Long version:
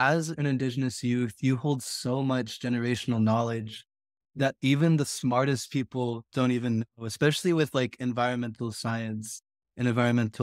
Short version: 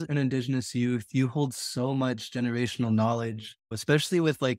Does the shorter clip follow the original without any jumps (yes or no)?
no